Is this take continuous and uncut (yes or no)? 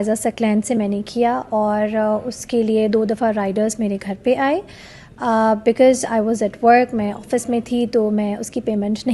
yes